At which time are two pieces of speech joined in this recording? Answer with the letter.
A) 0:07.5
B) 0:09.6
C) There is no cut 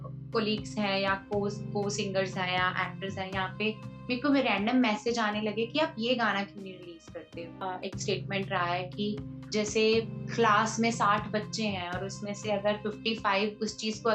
A